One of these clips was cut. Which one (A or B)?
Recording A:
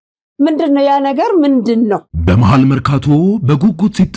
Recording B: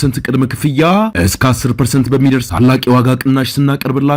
A